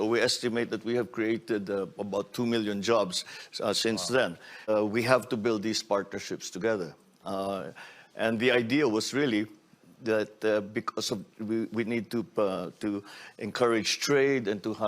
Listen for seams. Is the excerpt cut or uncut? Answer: cut